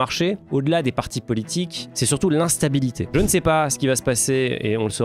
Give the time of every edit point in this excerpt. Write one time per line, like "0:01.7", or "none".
0:01.9
0:03.0